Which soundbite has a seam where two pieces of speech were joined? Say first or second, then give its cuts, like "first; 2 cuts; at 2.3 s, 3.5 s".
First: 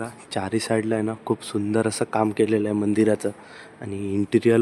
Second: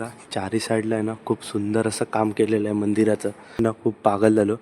second; 1 cut; at 3.6 s